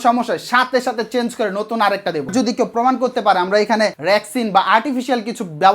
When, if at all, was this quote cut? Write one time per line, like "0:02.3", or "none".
0:02.3
0:04.0